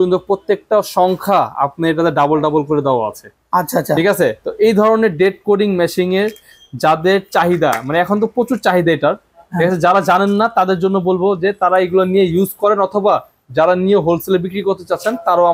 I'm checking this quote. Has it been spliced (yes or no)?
no